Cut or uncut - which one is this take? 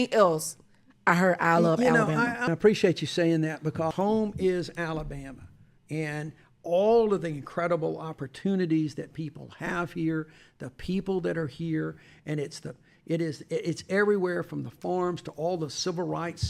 cut